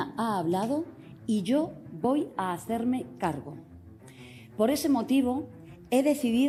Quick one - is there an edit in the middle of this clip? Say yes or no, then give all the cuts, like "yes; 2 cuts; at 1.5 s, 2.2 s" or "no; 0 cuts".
no; 0 cuts